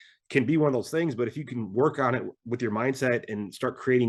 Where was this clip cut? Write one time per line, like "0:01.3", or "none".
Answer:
none